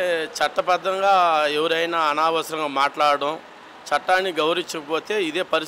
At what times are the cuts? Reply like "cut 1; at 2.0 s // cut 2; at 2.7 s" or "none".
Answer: none